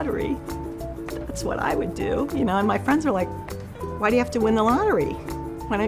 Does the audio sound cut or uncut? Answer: uncut